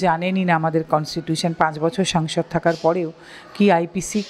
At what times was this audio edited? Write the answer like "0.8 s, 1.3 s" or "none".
none